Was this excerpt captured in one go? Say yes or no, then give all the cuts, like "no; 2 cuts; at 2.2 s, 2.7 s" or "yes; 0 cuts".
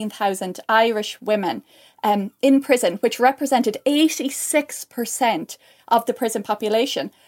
yes; 0 cuts